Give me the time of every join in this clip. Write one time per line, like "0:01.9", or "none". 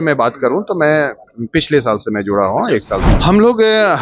0:03.1